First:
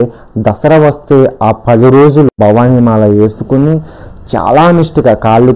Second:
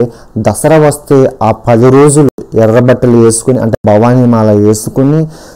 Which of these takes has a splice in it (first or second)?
first